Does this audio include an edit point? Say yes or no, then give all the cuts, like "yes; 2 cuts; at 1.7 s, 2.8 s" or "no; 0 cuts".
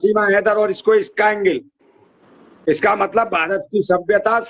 no; 0 cuts